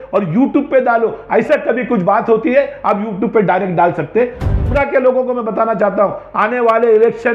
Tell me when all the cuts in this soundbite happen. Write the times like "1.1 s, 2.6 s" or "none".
4.6 s